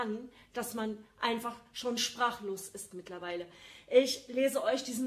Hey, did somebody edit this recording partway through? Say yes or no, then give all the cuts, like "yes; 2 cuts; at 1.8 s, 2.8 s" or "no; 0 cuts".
no; 0 cuts